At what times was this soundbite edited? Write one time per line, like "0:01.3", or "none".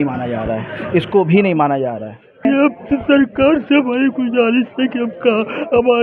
0:02.4